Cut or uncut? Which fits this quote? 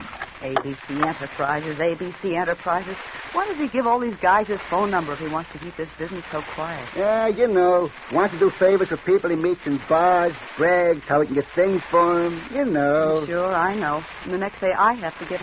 cut